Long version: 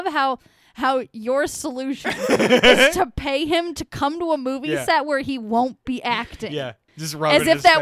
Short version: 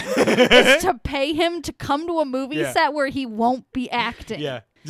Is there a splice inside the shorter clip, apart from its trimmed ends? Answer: no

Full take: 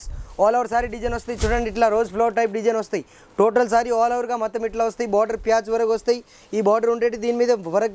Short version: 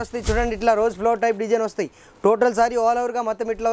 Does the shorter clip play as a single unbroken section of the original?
yes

